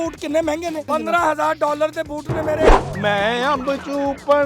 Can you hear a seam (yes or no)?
yes